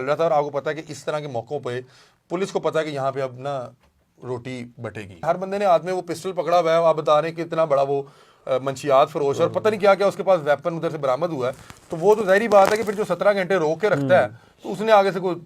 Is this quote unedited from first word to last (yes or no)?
no